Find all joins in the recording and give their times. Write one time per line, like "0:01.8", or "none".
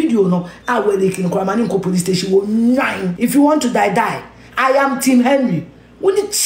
0:03.0